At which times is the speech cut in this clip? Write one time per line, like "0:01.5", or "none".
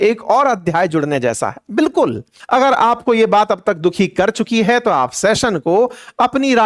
0:02.3